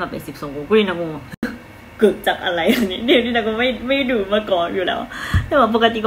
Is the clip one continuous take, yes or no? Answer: yes